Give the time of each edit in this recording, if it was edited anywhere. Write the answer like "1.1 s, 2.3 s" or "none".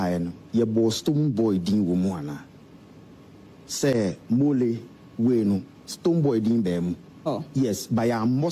7.2 s